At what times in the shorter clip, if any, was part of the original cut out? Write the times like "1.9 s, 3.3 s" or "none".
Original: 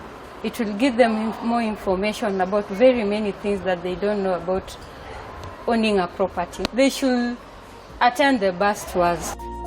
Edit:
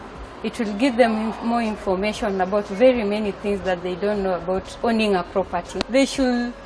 4.7 s